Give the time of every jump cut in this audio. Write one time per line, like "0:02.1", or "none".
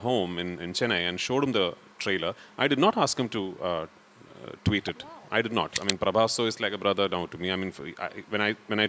0:05.8